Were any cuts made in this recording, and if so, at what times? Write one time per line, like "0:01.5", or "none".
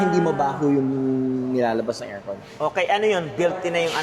none